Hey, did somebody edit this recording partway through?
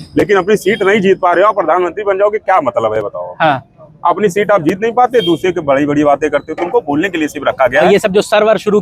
no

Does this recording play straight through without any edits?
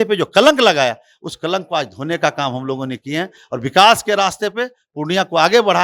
yes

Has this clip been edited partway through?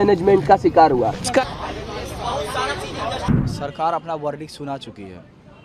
yes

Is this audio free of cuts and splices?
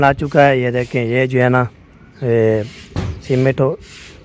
yes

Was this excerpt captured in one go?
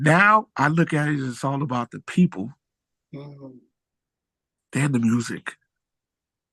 yes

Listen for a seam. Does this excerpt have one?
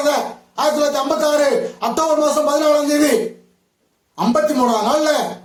no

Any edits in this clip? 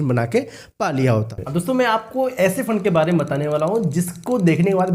yes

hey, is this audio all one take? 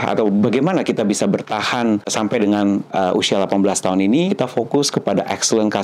no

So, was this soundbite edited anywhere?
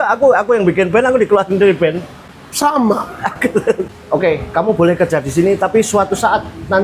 yes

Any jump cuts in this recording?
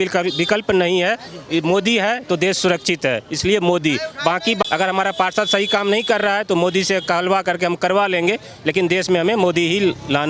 no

